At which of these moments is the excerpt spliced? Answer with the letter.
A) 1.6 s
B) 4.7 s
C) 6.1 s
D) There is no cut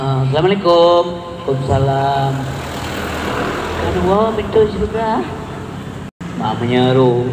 C